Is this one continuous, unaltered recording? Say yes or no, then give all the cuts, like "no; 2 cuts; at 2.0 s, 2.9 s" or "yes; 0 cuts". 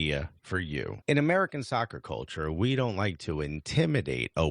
no; 1 cut; at 0.9 s